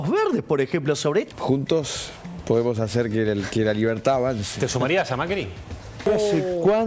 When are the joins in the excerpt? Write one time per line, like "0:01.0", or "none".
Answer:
0:01.3
0:06.1